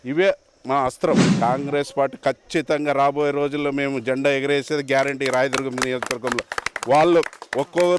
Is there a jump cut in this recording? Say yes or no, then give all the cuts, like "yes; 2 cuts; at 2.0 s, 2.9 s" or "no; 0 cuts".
yes; 1 cut; at 1.1 s